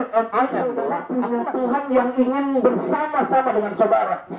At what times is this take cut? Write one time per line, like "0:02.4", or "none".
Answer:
0:01.0